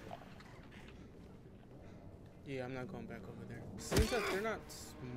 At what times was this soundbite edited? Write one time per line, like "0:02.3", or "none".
0:03.7